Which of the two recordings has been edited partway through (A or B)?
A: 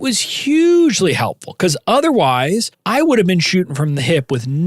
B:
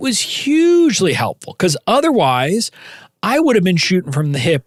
A